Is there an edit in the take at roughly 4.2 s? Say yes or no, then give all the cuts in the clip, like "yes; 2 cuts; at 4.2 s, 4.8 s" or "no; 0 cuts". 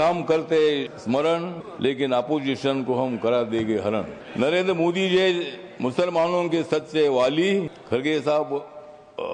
yes; 4 cuts; at 0.9 s, 1.6 s, 4.2 s, 7.8 s